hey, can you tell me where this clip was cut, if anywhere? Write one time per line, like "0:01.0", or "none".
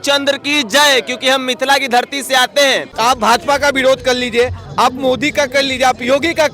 0:02.9